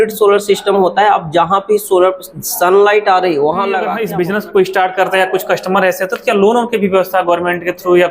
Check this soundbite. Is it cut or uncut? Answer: cut